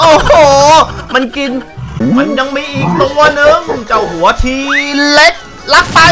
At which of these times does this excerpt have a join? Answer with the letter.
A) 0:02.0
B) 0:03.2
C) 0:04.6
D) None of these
A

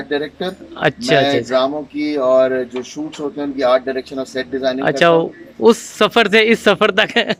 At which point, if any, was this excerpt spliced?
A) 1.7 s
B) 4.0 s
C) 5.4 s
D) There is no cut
D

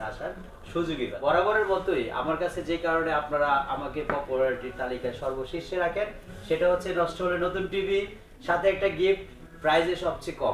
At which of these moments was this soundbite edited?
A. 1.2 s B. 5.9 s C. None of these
A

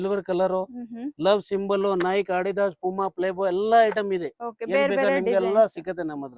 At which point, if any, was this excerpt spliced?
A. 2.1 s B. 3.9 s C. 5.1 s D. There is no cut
D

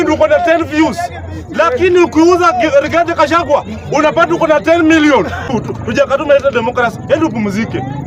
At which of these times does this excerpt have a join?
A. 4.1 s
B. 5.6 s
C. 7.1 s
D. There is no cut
B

